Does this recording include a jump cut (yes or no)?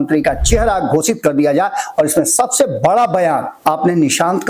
yes